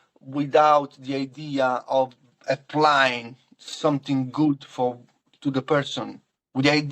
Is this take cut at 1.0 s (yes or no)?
no